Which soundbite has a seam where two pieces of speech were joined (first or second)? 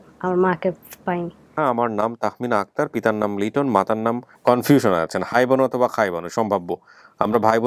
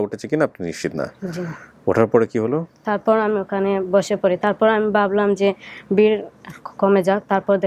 first